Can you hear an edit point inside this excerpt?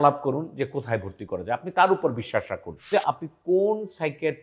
yes; 1 cut; at 2.9 s

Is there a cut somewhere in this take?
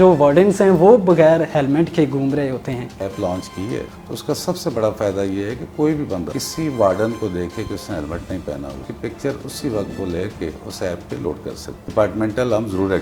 yes; 5 cuts; at 2.9 s, 4.0 s, 6.3 s, 8.9 s, 11.8 s

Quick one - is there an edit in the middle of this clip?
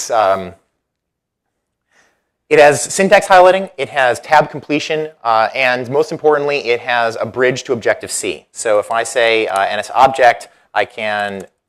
no; 0 cuts

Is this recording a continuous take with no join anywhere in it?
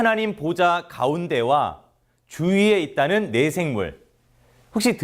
no; 1 cut; at 3.9 s

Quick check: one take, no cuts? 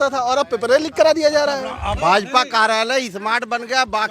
no; 1 cut; at 1.9 s

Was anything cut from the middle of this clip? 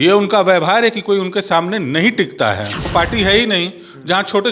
yes; 1 cut; at 2.7 s

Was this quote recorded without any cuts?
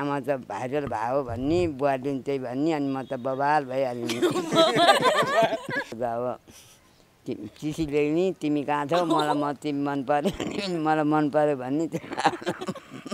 no; 1 cut; at 5.9 s

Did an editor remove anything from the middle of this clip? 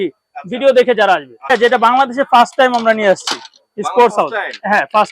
yes; 1 cut; at 1.5 s

